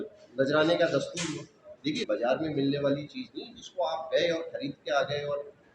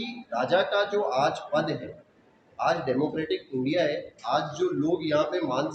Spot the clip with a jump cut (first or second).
first